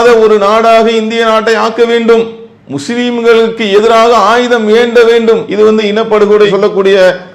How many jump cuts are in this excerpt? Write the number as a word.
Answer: zero